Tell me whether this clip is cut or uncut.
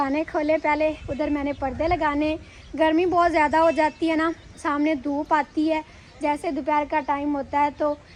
uncut